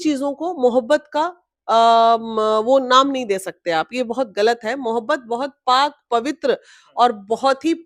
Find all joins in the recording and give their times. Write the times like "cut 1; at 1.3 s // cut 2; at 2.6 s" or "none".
none